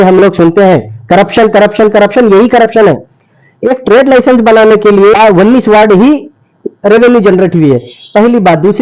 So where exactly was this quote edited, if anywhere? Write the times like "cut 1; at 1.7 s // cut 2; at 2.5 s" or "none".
cut 1; at 5.2 s